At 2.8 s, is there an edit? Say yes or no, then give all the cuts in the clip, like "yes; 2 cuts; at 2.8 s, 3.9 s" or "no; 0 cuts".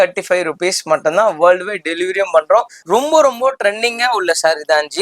yes; 1 cut; at 2.8 s